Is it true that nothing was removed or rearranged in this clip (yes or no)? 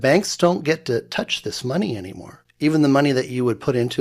yes